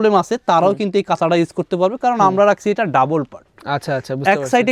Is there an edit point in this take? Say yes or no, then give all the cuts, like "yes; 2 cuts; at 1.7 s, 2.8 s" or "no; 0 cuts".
no; 0 cuts